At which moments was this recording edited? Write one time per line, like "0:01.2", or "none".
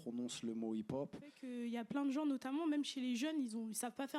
0:01.4